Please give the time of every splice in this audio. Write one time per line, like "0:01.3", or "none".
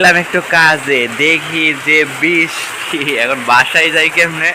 none